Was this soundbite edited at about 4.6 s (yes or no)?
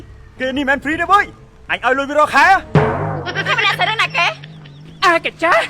yes